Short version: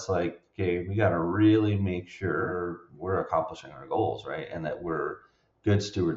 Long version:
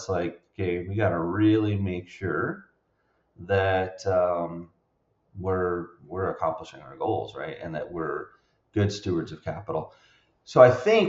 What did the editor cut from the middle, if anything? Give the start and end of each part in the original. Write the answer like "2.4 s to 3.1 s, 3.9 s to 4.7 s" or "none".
2.6 s to 5.7 s